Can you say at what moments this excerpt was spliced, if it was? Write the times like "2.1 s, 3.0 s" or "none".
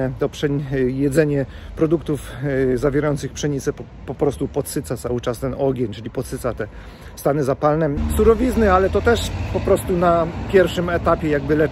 8.0 s